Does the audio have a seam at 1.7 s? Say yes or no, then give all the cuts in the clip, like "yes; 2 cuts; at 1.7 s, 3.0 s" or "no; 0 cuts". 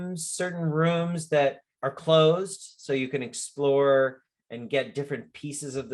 yes; 1 cut; at 1.7 s